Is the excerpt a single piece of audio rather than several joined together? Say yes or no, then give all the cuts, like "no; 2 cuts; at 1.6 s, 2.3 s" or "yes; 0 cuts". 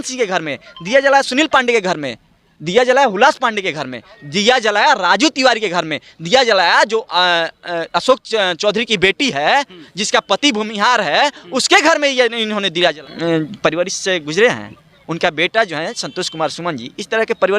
no; 1 cut; at 13.0 s